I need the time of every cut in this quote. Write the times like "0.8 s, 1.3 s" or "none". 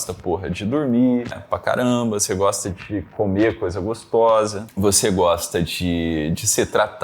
1.4 s, 4.6 s